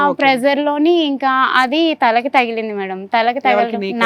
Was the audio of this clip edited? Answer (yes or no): no